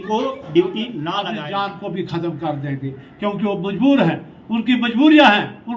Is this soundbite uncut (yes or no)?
no